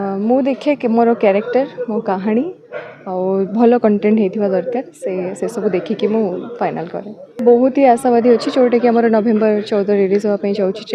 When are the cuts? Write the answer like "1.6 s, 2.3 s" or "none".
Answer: 7.3 s